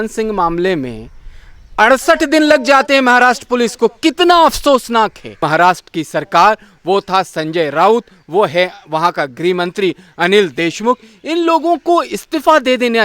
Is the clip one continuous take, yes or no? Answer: no